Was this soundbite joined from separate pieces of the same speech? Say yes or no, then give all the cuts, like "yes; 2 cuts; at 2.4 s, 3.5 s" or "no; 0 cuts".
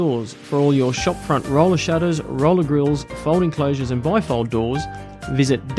no; 0 cuts